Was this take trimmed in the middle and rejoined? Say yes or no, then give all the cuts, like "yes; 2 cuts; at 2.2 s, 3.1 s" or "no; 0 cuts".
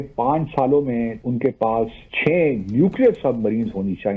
yes; 2 cuts; at 1.2 s, 2.1 s